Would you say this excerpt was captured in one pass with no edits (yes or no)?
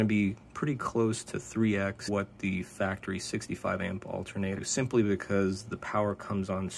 no